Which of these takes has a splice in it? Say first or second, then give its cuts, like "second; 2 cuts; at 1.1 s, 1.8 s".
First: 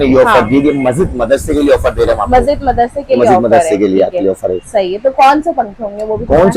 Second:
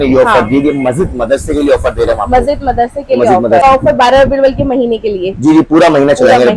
second; 1 cut; at 3.6 s